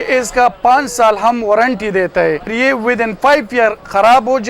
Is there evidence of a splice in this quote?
yes; 1 cut; at 2.5 s

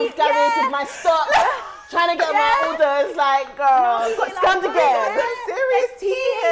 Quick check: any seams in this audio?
no; 0 cuts

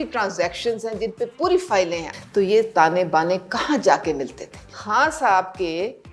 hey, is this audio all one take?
no; 2 cuts; at 2.0 s, 4.7 s

